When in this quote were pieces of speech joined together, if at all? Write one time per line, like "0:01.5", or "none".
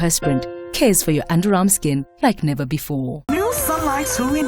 0:03.3